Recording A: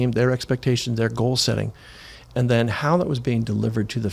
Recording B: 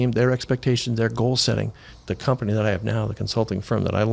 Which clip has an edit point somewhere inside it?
B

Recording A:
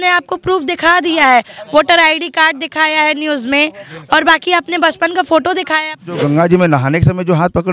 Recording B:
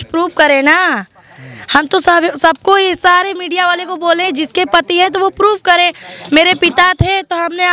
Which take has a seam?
A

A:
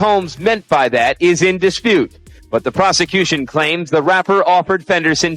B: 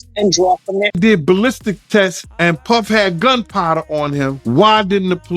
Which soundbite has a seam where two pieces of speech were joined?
B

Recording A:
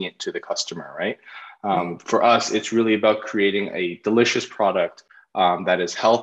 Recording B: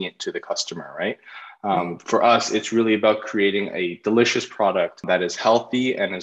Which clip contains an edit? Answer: B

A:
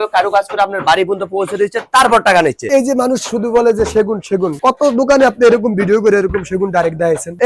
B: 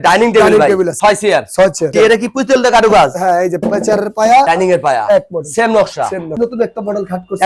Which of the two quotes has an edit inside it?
B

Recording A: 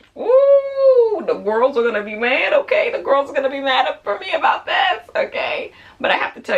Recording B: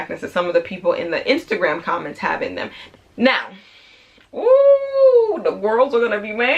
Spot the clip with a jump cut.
B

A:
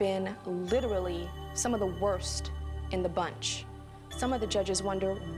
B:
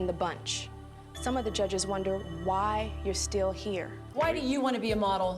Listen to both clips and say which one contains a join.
B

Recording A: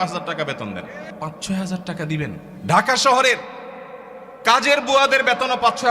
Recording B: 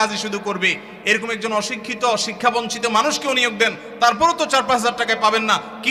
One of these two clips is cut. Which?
A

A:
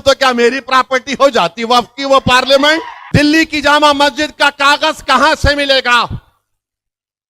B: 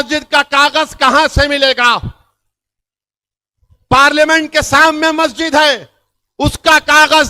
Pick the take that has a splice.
A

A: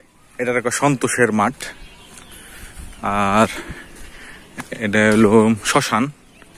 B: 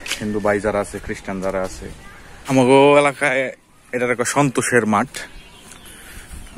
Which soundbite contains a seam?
B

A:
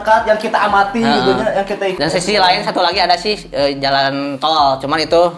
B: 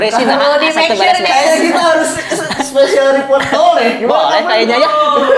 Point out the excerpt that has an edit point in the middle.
A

